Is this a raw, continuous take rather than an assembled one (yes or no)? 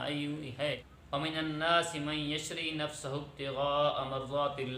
no